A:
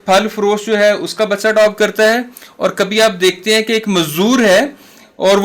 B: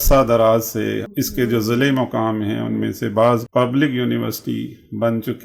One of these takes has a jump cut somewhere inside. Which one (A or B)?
B